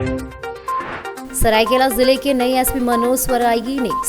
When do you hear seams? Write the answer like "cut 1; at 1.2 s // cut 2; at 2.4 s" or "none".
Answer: cut 1; at 1.2 s